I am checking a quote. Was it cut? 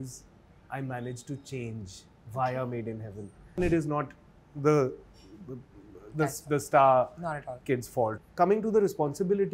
yes; 2 cuts; at 3.6 s, 8.2 s

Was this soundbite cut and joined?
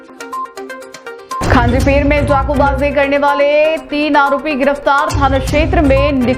yes; 1 cut; at 1.4 s

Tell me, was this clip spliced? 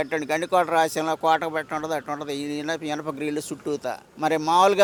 no; 0 cuts

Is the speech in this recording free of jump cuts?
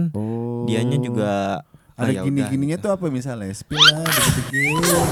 yes; 0 cuts

